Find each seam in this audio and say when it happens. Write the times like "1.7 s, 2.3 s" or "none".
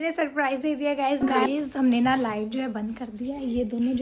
1.3 s